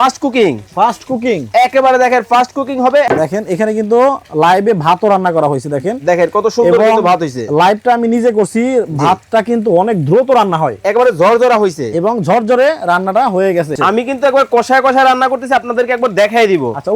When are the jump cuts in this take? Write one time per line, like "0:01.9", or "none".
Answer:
0:03.1
0:13.8